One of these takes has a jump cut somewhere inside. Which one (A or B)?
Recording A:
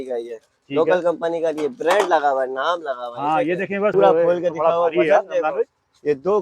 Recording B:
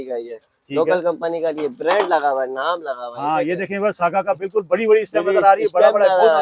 A